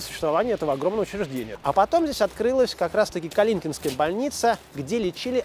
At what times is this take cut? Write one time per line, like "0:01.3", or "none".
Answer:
0:01.5